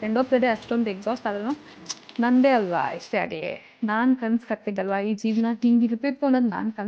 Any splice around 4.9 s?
no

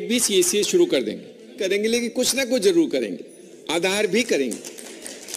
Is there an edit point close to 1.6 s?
yes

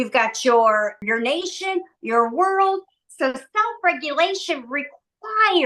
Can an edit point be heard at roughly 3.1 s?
no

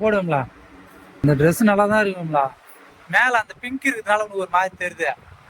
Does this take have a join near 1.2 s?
yes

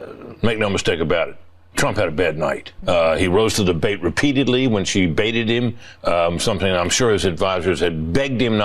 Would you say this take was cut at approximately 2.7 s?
yes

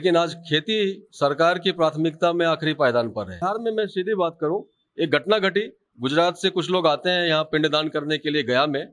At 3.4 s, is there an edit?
yes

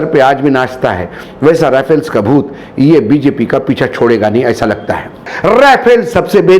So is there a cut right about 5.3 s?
yes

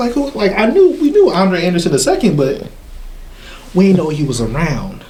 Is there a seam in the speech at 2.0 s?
no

